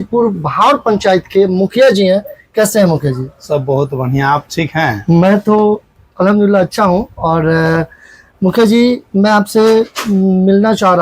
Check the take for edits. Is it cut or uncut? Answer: uncut